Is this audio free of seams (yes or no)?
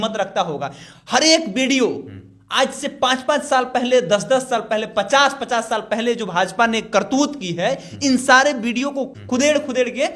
no